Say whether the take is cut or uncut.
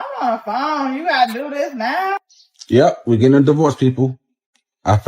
cut